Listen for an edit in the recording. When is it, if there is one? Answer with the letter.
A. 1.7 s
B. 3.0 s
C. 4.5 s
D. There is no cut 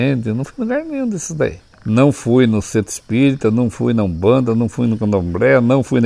A